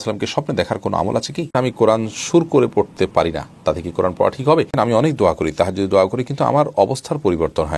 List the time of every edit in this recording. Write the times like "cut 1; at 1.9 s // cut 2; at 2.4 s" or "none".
cut 1; at 1.5 s // cut 2; at 4.7 s